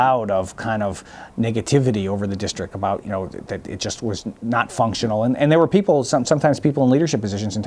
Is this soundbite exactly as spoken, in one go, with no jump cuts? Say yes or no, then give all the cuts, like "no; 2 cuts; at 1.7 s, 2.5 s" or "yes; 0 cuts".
yes; 0 cuts